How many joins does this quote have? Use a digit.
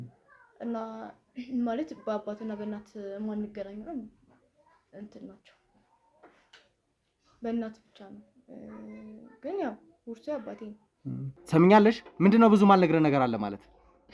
1